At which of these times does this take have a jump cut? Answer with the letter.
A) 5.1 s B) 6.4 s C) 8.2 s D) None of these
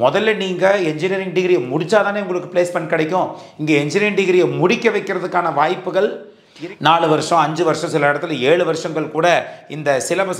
B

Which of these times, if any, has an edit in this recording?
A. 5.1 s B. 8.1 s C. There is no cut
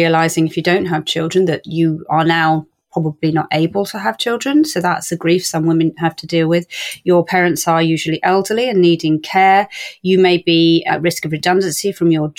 A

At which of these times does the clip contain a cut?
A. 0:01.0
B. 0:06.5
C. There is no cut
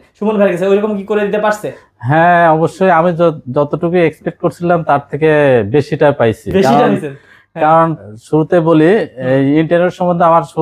C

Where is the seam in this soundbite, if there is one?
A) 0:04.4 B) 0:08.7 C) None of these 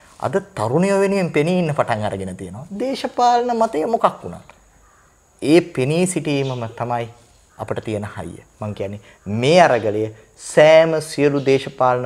C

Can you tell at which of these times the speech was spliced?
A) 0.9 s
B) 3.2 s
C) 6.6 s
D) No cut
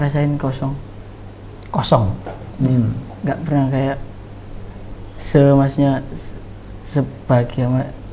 D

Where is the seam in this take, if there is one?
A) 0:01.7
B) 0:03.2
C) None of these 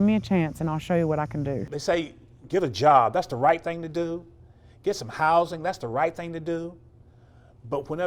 A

